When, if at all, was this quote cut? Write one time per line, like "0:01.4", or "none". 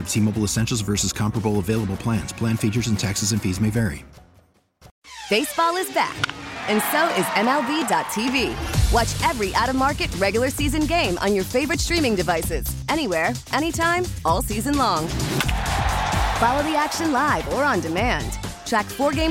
0:04.9